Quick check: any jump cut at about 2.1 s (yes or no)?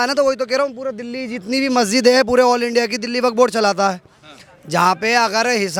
no